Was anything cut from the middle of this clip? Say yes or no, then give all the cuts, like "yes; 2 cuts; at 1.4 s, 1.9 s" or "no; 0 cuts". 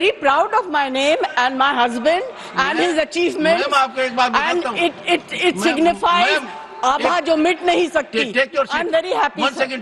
no; 0 cuts